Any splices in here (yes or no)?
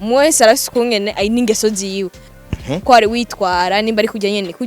yes